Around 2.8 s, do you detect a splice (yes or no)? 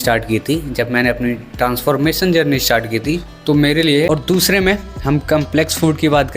no